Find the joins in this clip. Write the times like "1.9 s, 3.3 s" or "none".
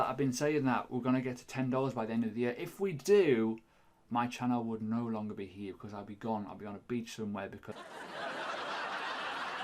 7.8 s